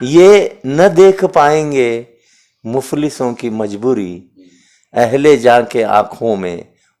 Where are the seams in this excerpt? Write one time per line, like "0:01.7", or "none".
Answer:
none